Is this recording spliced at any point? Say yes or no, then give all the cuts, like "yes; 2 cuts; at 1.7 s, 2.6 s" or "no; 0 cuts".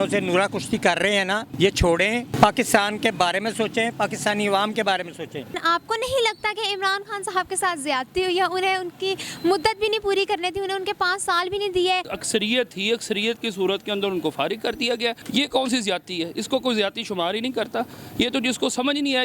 yes; 5 cuts; at 1.5 s, 2.3 s, 5.6 s, 12.1 s, 15.2 s